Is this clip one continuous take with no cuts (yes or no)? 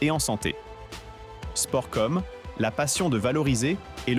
yes